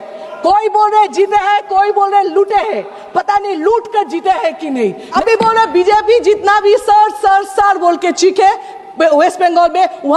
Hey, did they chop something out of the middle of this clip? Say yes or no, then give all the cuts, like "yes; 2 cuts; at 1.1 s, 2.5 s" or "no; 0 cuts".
yes; 1 cut; at 5.1 s